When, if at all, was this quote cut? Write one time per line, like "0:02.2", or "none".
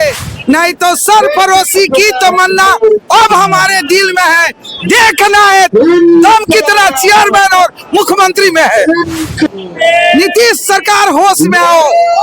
0:09.5